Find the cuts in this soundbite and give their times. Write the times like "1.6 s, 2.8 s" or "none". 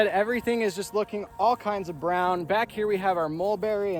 none